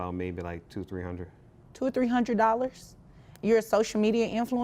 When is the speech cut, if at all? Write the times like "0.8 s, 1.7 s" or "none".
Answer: none